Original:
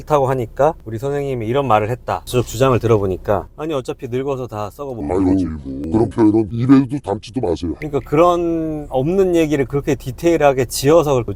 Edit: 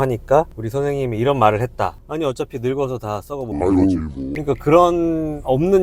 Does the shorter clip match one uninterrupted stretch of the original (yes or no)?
no